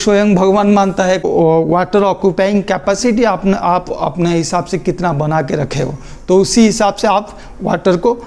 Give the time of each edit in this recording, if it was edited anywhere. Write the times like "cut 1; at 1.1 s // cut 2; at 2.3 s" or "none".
cut 1; at 1.2 s